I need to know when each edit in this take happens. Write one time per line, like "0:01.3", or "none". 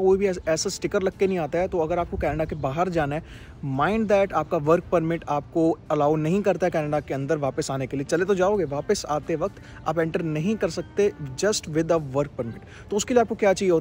none